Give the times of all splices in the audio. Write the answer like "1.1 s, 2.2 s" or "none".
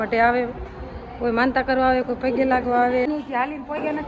3.1 s